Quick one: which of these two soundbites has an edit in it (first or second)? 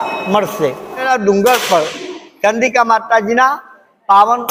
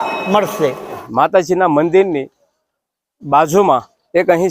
second